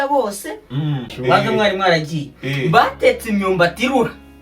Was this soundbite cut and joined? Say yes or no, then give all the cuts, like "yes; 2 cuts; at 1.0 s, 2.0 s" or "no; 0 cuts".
yes; 1 cut; at 1.0 s